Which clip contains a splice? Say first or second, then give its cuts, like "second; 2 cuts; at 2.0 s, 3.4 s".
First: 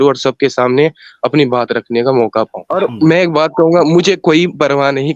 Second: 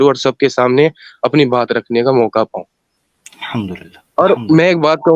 first; 1 cut; at 2.6 s